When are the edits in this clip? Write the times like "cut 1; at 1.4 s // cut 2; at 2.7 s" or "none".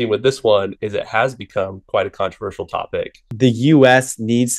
cut 1; at 3.2 s